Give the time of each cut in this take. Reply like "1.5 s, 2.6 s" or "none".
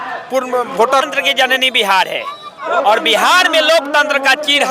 1.0 s

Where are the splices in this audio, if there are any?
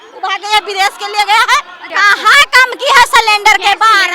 1.9 s

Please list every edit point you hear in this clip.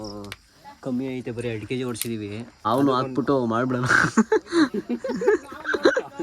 2.6 s

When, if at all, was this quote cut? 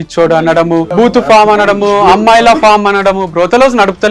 0.9 s

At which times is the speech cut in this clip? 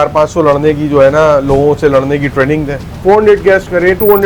2.9 s

